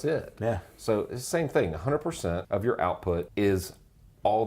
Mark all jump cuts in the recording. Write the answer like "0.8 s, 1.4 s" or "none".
2.4 s, 3.3 s